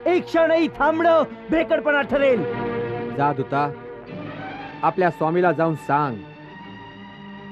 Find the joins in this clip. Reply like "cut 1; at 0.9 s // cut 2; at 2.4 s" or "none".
cut 1; at 2.5 s